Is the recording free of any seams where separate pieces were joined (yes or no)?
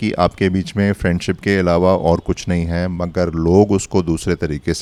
yes